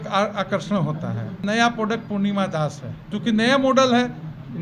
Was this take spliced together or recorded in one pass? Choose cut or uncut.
cut